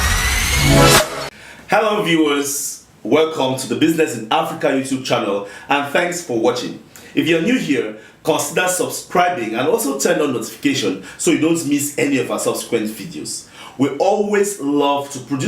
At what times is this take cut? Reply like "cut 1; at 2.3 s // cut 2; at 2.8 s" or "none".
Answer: cut 1; at 1.2 s